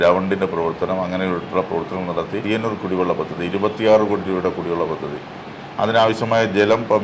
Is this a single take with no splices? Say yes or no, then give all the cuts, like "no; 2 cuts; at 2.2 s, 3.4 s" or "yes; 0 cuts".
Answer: no; 1 cut; at 2.4 s